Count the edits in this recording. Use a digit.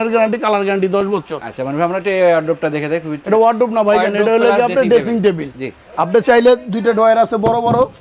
0